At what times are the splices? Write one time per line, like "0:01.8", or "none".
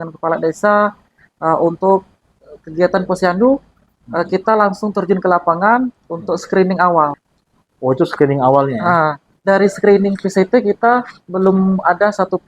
0:09.3